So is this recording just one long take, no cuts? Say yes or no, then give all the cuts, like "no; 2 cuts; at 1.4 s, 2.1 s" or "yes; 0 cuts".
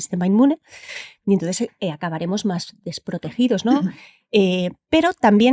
yes; 0 cuts